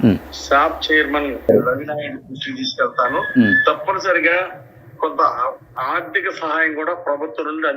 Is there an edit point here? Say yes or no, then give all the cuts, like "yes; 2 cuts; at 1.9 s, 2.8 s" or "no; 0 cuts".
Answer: no; 0 cuts